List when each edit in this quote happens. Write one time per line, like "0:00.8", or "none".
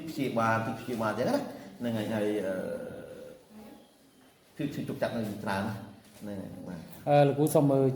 none